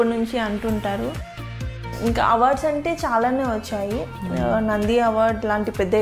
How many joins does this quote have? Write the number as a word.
one